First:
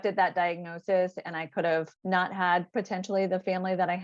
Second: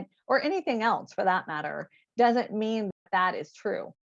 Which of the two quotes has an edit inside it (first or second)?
first